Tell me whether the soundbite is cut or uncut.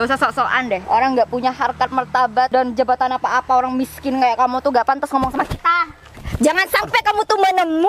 cut